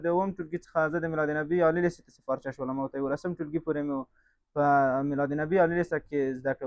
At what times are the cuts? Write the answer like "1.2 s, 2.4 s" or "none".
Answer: none